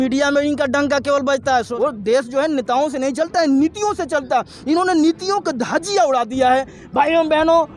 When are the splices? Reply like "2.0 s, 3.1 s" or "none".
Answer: 1.7 s

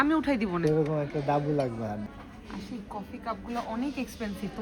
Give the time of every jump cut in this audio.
2.1 s

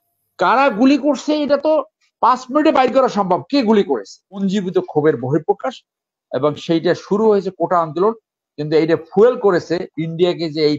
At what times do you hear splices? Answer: 4.4 s

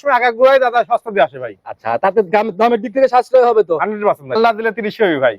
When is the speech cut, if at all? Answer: 4.3 s

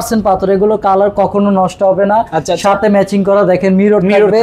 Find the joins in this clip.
none

